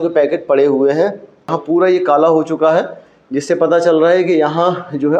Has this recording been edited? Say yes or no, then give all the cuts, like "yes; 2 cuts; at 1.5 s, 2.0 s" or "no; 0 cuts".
yes; 1 cut; at 1.5 s